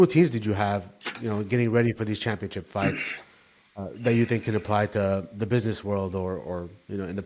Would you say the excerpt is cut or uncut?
uncut